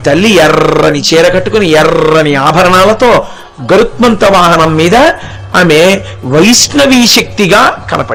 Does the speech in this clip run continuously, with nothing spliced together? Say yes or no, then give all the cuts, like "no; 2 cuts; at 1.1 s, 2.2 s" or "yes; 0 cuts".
yes; 0 cuts